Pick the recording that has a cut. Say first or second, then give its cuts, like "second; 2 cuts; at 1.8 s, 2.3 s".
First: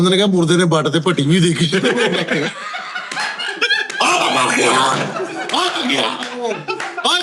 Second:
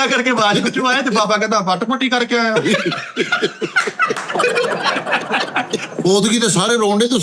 second; 1 cut; at 5.9 s